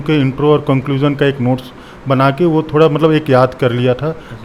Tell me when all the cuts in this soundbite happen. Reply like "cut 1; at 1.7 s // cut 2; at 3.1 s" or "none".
none